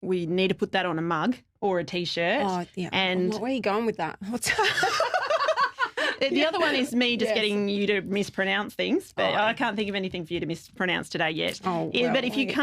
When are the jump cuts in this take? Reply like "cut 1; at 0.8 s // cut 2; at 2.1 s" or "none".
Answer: none

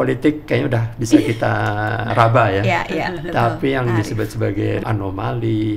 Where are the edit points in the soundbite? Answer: cut 1; at 2.1 s // cut 2; at 4.8 s

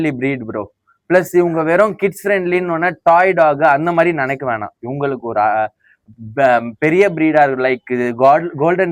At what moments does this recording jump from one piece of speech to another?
none

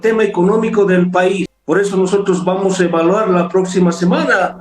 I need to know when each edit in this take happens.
cut 1; at 1.5 s

